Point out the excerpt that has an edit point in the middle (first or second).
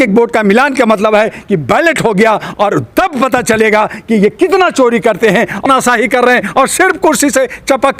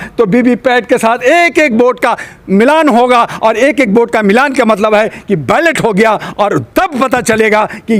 first